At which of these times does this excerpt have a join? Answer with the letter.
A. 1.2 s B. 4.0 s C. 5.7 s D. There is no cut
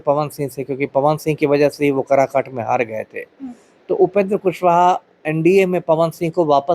D